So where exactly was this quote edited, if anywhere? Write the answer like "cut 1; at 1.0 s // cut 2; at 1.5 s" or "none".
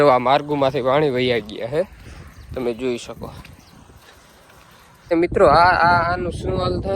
cut 1; at 5.1 s